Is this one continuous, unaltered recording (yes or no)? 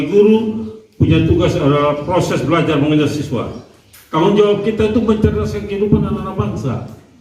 yes